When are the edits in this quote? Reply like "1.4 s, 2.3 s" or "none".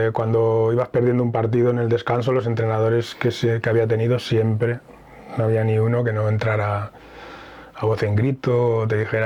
none